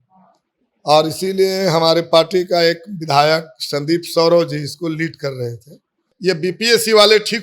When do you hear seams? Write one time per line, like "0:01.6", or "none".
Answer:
0:06.1